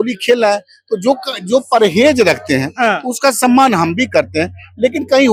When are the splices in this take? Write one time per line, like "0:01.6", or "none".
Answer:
none